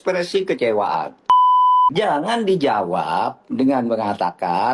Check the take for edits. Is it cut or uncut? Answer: uncut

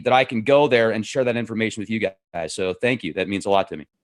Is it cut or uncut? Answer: uncut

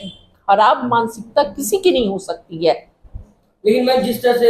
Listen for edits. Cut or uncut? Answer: uncut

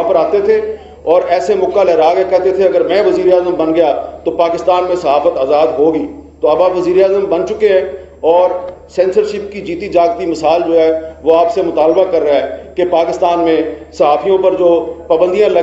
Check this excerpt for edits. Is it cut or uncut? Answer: uncut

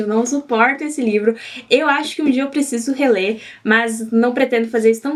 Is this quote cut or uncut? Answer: uncut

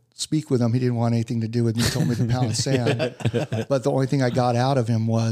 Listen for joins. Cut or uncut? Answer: uncut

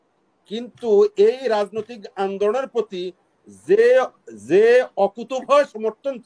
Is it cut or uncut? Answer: uncut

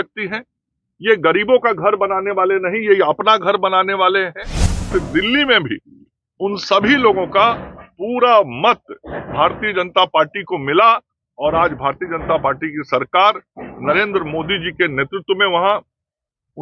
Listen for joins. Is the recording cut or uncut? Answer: cut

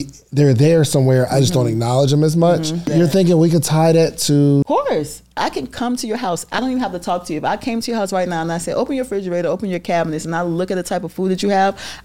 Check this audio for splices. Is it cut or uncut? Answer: cut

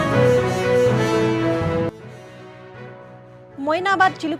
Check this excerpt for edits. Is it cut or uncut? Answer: uncut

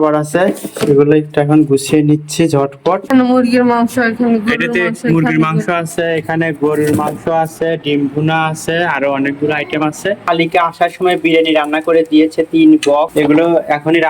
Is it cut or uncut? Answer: cut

